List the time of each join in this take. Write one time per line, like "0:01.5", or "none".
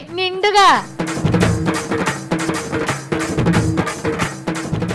none